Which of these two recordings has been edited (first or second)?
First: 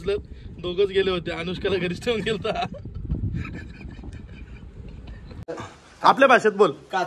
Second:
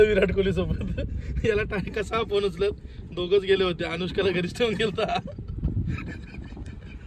first